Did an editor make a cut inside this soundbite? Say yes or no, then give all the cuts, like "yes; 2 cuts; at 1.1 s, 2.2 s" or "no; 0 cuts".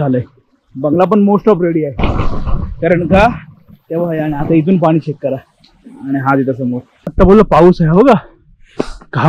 yes; 1 cut; at 7.1 s